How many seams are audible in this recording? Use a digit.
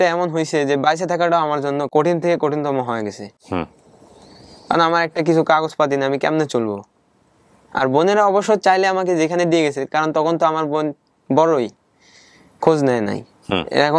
0